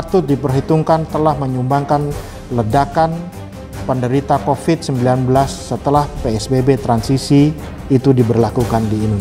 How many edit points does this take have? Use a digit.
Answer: 0